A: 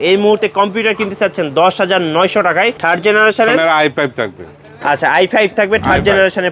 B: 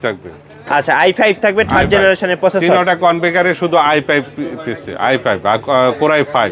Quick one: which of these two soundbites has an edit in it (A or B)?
A